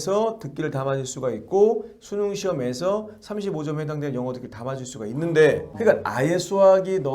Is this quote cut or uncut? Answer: cut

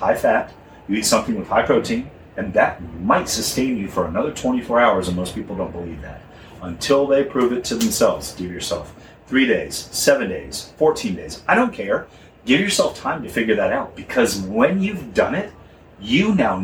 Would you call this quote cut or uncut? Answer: uncut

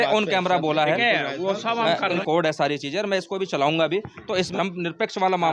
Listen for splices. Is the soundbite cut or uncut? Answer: cut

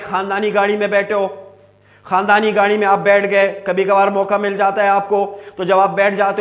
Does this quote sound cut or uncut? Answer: uncut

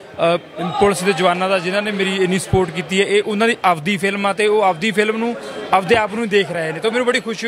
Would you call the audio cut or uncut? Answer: uncut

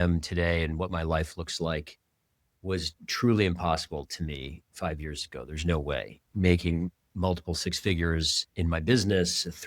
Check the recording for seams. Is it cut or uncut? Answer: cut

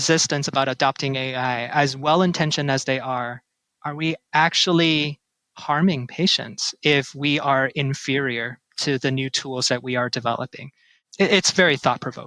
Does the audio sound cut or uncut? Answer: cut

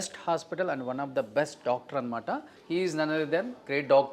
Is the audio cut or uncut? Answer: cut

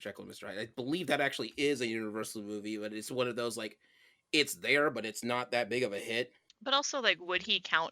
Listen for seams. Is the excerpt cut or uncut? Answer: cut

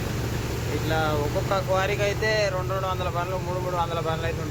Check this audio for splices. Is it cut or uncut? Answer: uncut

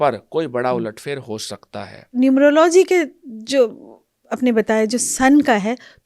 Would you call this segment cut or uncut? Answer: cut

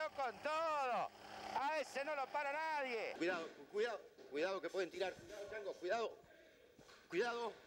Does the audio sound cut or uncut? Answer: cut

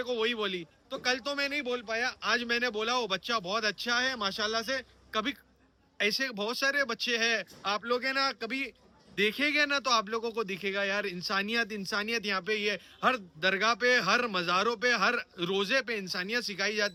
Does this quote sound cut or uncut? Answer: uncut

